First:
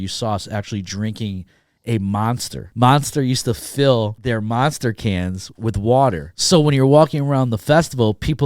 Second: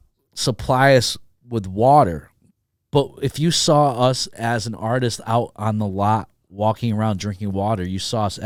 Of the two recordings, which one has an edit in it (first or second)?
first